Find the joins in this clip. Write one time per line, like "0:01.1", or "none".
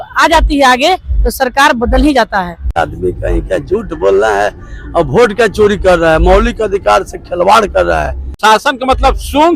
0:02.7
0:08.4